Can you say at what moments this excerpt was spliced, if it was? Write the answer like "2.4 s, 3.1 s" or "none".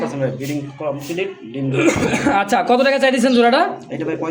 none